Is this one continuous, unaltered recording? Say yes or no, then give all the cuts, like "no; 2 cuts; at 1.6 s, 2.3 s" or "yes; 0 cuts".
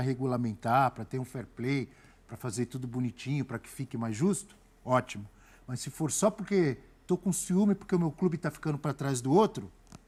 yes; 0 cuts